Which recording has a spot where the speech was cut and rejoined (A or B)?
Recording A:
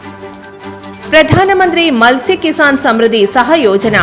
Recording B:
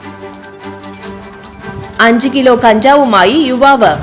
A